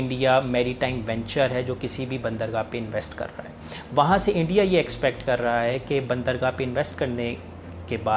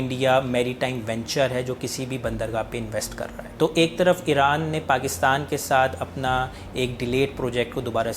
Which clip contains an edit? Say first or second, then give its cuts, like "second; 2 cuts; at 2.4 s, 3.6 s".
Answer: second; 1 cut; at 3.4 s